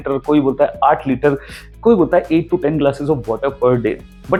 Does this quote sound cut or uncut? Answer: uncut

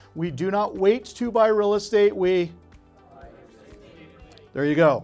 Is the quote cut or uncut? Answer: uncut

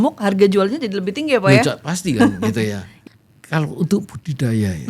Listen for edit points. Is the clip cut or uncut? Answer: cut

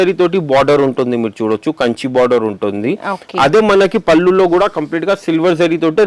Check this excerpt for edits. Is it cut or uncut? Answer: uncut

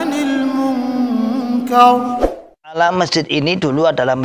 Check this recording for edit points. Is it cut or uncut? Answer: cut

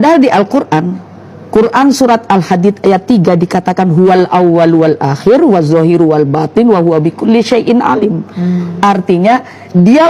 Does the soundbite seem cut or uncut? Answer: uncut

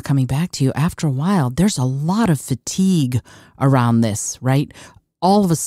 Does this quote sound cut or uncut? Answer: uncut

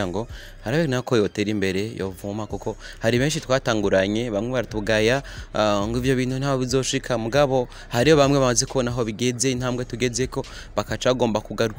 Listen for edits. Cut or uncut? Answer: uncut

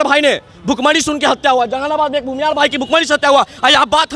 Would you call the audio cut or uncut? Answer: uncut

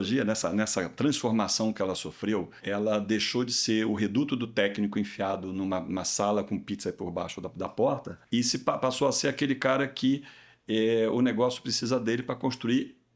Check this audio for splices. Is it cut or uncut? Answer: cut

